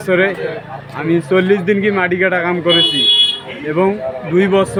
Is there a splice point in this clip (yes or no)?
no